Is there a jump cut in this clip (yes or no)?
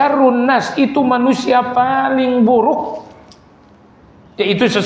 no